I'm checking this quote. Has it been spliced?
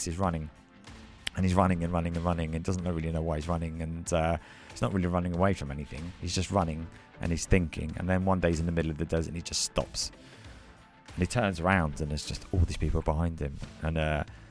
no; 0 cuts

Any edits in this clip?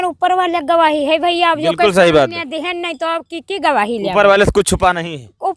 no; 0 cuts

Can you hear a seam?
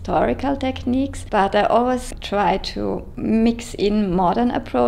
yes; 2 cuts; at 1.2 s, 3.1 s

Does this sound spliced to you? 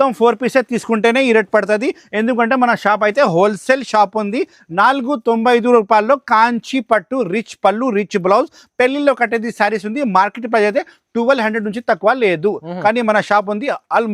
no; 0 cuts

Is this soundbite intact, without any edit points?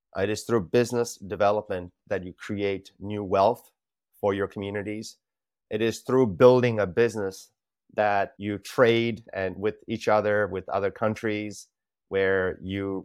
yes; 0 cuts

